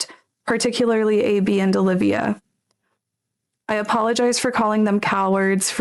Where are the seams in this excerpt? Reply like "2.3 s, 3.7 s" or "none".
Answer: none